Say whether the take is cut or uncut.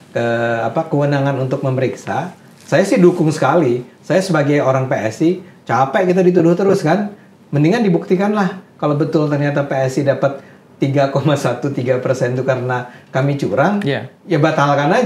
uncut